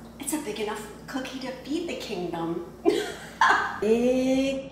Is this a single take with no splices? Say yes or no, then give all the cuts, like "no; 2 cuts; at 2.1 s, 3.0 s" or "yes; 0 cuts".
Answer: yes; 0 cuts